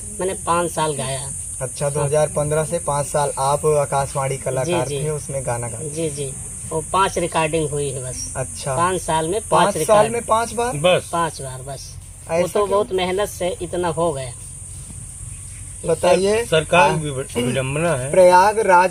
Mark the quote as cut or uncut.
uncut